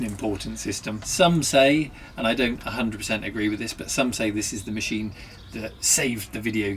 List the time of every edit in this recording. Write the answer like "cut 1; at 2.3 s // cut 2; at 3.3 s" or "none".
cut 1; at 1.0 s

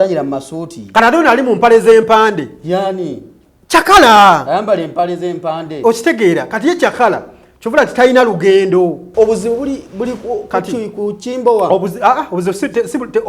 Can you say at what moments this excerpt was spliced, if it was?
cut 1; at 9.0 s

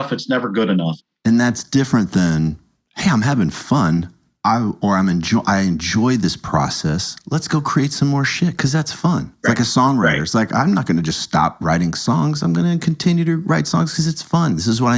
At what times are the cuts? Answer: cut 1; at 0.9 s

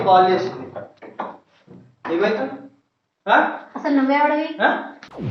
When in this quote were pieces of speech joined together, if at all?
none

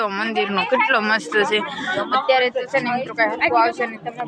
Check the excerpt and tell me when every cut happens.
none

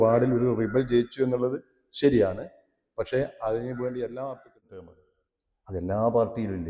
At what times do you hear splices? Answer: cut 1; at 4.9 s

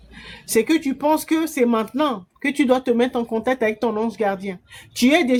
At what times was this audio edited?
none

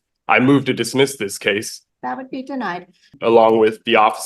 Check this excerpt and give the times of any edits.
cut 1; at 1.8 s // cut 2; at 3.1 s

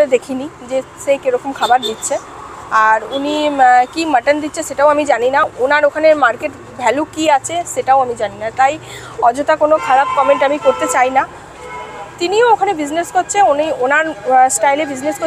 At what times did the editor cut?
none

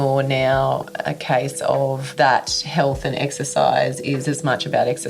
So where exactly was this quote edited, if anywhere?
cut 1; at 2.1 s

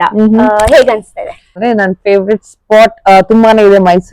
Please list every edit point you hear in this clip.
cut 1; at 1.6 s

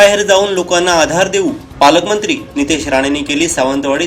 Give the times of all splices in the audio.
none

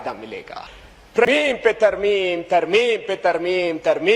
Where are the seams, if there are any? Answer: cut 1; at 1.2 s

